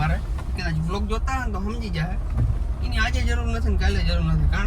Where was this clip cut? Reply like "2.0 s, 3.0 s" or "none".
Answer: none